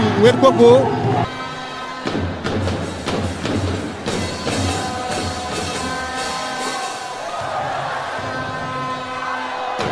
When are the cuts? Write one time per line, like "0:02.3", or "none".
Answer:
none